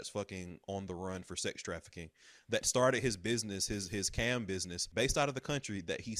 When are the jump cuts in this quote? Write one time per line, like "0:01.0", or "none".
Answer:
0:04.8